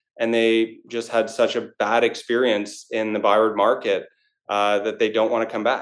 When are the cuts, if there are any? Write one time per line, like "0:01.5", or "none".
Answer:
none